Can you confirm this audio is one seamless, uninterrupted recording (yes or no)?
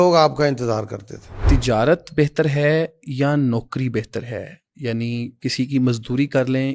no